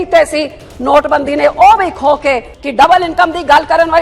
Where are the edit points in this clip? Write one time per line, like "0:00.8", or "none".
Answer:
0:02.5